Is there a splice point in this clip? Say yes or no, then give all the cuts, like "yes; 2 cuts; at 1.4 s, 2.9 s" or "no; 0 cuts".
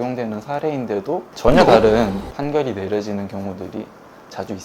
yes; 2 cuts; at 1.3 s, 2.3 s